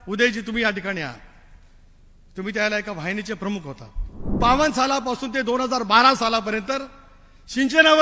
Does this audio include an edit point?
yes; 1 cut; at 4.4 s

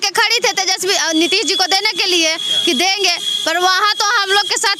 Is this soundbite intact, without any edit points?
yes; 0 cuts

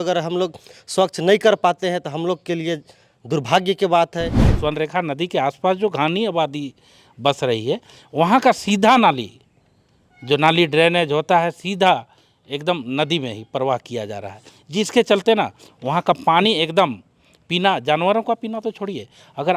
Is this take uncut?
no; 1 cut; at 4.4 s

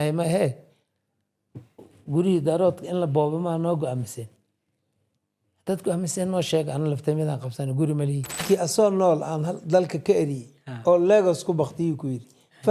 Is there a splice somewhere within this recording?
yes; 1 cut; at 8.4 s

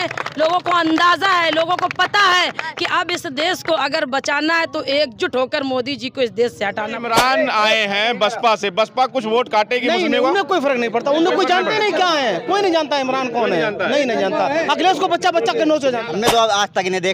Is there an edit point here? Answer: yes; 2 cuts; at 7.0 s, 16.0 s

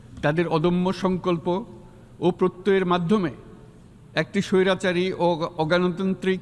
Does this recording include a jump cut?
no; 0 cuts

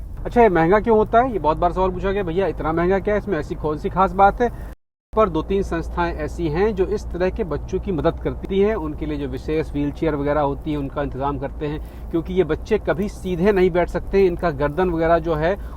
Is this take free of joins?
no; 1 cut; at 4.8 s

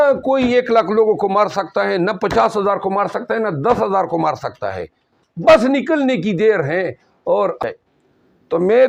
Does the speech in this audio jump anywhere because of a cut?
yes; 1 cut; at 7.6 s

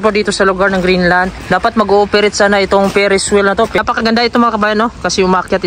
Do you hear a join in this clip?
yes; 2 cuts; at 1.4 s, 3.8 s

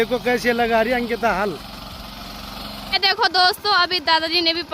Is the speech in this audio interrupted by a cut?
no; 0 cuts

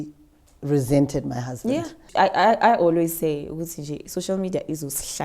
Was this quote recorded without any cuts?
no; 1 cut; at 2.0 s

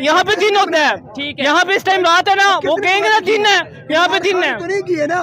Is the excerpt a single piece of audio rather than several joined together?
yes; 0 cuts

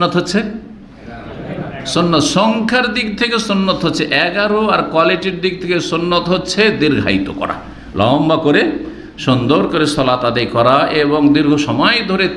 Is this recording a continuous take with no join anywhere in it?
yes; 0 cuts

